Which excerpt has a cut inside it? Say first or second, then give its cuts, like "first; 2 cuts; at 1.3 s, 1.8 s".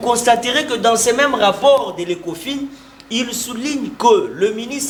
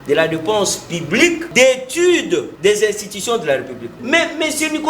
second; 3 cuts; at 1.5 s, 2.5 s, 3.9 s